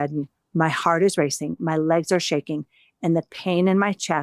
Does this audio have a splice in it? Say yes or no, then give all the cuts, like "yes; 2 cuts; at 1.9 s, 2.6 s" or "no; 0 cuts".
no; 0 cuts